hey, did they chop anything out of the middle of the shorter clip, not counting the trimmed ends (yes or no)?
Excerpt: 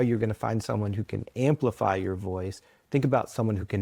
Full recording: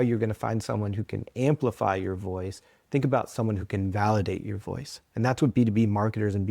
no